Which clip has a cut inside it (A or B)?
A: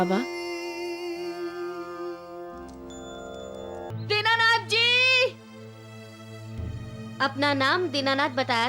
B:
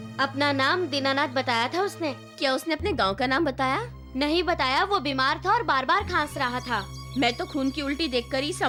A